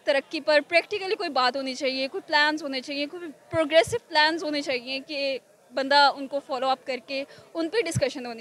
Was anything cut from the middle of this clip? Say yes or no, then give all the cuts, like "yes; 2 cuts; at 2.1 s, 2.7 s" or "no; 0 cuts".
no; 0 cuts